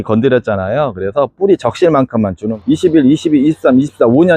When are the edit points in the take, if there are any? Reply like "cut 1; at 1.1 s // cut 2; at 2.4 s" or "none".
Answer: cut 1; at 2.5 s